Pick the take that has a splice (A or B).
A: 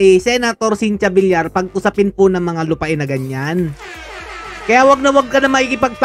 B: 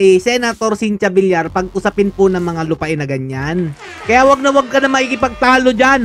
B